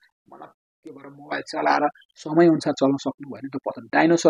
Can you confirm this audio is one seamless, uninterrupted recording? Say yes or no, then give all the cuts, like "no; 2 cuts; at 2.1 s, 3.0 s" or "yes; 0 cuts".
no; 1 cut; at 2.1 s